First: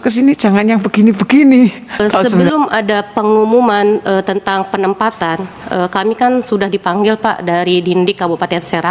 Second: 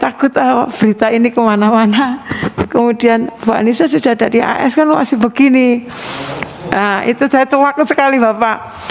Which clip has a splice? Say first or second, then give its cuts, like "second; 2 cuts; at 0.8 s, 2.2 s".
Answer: first; 1 cut; at 2.5 s